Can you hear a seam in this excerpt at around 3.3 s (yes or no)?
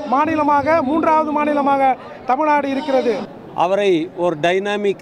yes